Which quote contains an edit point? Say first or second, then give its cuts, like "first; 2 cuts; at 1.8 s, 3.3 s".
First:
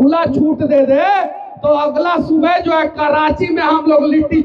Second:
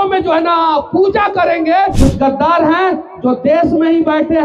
second; 1 cut; at 1.9 s